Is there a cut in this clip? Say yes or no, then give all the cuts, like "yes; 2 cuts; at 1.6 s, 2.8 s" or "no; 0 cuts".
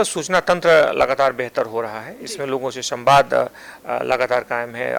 no; 0 cuts